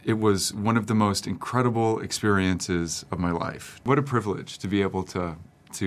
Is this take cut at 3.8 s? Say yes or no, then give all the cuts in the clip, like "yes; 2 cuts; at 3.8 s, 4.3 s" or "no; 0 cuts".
yes; 1 cut; at 3.8 s